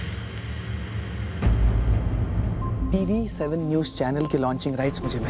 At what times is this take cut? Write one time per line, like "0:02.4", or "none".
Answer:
0:02.7